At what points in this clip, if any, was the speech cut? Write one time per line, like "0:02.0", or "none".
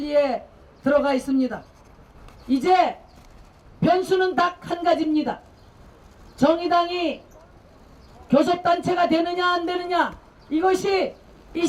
none